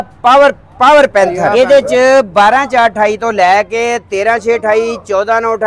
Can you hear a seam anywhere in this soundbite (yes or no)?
yes